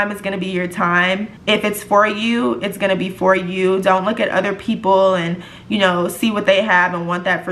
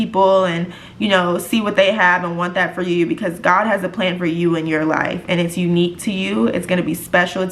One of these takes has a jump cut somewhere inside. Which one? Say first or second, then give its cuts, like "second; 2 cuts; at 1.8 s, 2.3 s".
first; 1 cut; at 1.3 s